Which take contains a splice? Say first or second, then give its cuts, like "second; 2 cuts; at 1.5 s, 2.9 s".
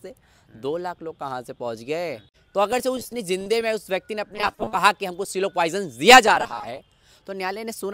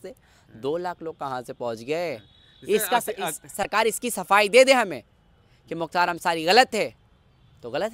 first; 1 cut; at 2.3 s